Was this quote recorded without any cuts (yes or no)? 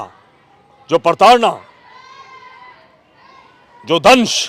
yes